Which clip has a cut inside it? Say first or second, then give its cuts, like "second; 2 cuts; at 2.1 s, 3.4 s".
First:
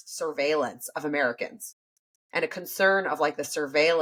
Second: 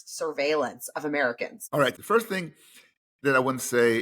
second; 1 cut; at 1.9 s